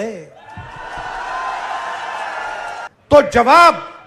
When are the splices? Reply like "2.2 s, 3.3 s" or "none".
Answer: 3.1 s